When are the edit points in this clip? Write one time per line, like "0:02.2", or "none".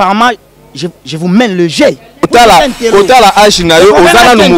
0:02.3